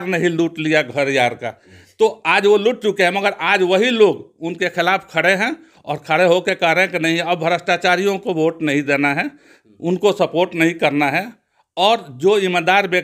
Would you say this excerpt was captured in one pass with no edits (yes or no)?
yes